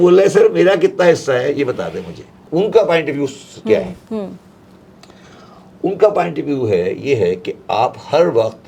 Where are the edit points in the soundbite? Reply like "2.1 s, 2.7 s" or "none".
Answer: none